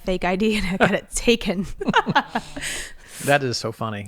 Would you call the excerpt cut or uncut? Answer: cut